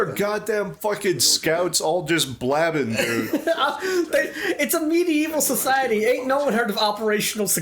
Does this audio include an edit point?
yes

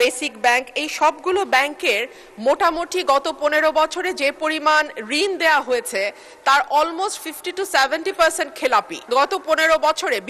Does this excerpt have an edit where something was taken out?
yes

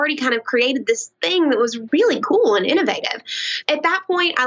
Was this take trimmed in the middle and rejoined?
yes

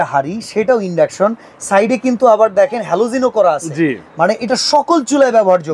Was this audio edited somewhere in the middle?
no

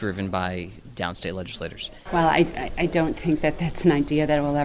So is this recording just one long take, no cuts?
no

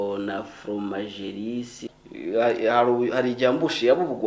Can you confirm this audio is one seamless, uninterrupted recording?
no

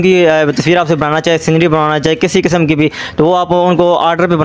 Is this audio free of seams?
yes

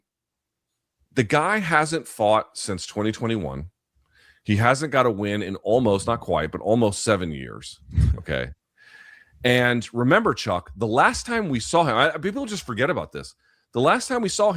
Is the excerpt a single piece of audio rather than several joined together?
yes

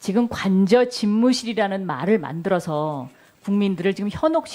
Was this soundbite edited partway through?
yes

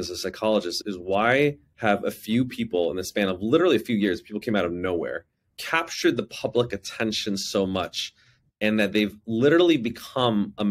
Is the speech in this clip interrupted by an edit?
no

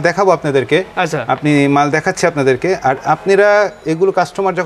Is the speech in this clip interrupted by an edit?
no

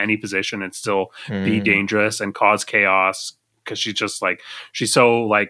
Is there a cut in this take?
no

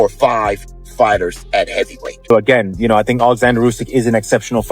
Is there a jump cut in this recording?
yes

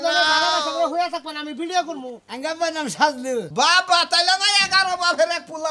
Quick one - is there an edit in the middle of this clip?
yes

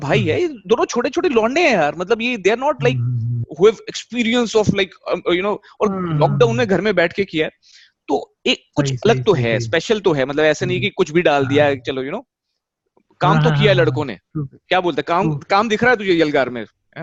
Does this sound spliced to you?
no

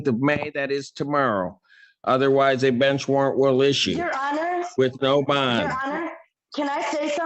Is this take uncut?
yes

